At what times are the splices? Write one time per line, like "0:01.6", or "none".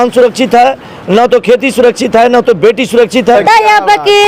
0:03.4